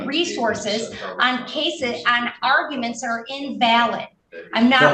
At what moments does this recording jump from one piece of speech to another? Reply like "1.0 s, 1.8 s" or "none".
none